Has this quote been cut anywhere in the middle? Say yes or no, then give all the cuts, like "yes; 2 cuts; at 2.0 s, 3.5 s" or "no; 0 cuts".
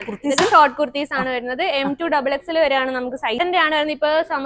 yes; 1 cut; at 3.4 s